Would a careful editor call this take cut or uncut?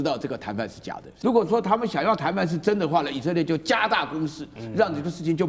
cut